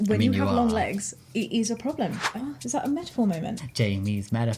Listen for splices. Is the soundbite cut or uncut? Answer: cut